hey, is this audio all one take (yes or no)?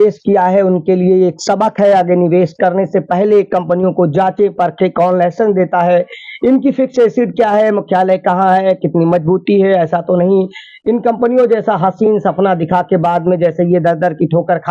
yes